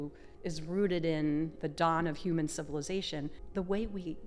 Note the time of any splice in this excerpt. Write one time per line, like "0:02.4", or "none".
0:01.6
0:03.4